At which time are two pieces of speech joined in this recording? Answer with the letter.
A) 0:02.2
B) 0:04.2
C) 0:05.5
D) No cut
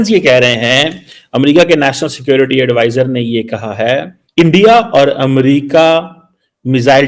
B